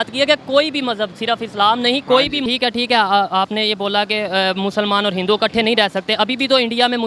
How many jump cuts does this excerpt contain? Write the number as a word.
one